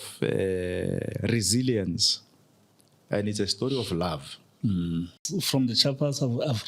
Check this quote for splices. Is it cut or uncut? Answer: cut